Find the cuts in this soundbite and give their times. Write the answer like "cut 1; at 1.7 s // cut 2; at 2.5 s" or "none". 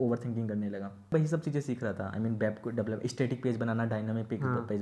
cut 1; at 1.1 s